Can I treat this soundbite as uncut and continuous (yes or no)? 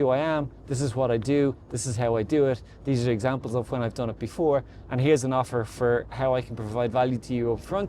yes